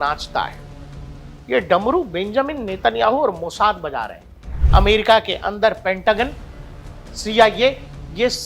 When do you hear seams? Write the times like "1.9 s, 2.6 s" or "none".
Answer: 4.6 s

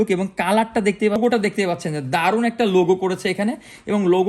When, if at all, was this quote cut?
1.2 s

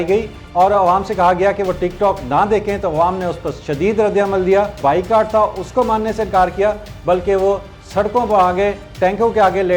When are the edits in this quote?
4.8 s

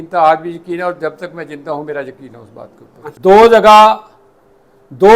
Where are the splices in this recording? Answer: 3.1 s

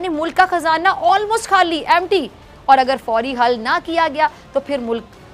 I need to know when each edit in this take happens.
none

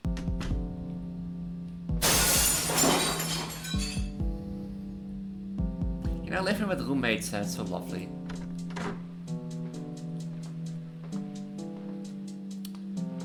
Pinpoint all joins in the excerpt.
none

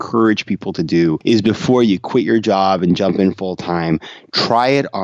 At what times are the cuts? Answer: 1.2 s

